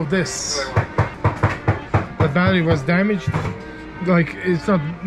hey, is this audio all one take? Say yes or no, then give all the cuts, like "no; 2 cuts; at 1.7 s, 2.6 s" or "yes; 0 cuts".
yes; 0 cuts